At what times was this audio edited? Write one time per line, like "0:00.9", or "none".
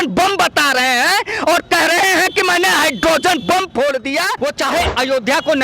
0:04.3